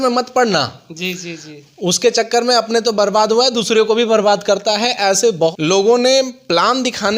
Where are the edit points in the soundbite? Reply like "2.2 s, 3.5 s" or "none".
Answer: 5.5 s